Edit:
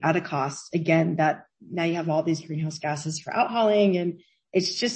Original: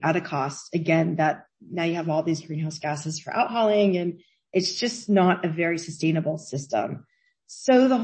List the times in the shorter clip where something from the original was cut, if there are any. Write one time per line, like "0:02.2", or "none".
none